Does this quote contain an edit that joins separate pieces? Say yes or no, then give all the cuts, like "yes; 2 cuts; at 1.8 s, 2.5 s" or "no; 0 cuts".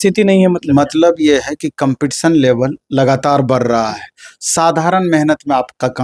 no; 0 cuts